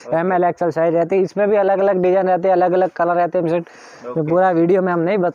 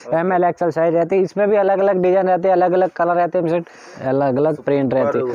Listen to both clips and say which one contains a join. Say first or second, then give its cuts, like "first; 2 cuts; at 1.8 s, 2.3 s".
second; 1 cut; at 3.9 s